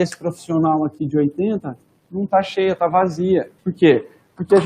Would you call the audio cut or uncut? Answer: cut